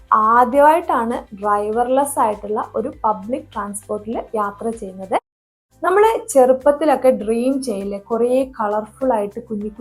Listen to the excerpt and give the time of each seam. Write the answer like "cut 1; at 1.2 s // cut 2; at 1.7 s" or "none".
cut 1; at 5.5 s